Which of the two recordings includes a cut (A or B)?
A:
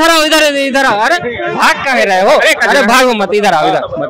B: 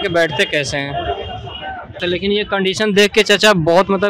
B